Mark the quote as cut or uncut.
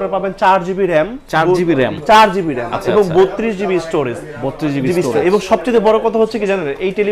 uncut